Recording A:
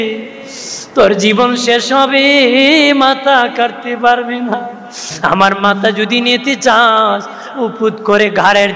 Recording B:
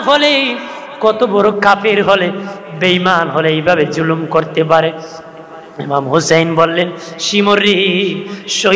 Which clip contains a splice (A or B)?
A